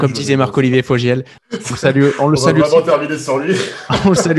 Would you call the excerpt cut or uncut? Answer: cut